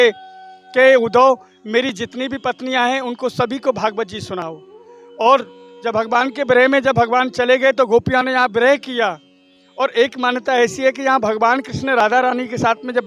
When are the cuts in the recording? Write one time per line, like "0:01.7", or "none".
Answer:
none